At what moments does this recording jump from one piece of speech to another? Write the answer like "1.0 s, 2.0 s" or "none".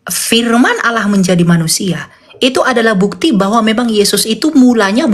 none